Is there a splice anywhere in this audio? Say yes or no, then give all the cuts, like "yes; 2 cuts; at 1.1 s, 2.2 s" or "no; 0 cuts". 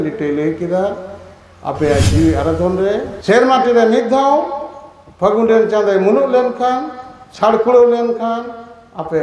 yes; 1 cut; at 3.1 s